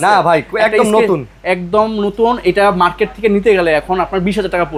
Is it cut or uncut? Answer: uncut